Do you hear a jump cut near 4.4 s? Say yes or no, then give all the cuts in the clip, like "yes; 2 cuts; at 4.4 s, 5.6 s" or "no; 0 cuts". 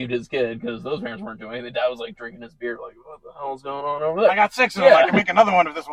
no; 0 cuts